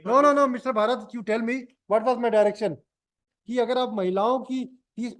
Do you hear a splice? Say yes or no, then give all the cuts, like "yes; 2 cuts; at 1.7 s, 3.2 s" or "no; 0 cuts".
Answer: yes; 1 cut; at 3.2 s